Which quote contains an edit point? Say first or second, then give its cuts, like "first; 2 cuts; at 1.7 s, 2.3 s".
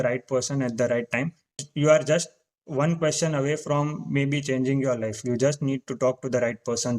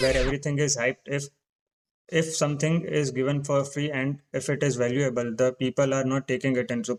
first; 1 cut; at 1.6 s